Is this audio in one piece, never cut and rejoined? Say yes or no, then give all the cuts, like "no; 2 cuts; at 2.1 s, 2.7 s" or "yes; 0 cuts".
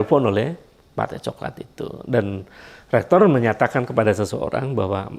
yes; 0 cuts